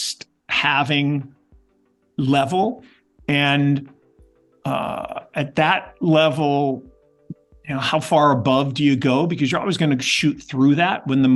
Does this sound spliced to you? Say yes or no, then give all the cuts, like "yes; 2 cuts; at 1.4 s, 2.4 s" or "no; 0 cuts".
no; 0 cuts